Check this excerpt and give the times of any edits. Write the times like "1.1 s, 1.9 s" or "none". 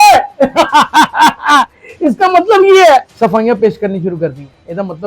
3.1 s